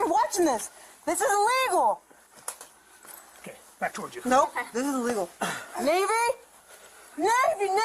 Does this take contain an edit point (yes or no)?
no